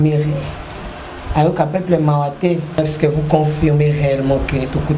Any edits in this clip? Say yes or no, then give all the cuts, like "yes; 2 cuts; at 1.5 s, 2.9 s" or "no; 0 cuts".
yes; 1 cut; at 2.8 s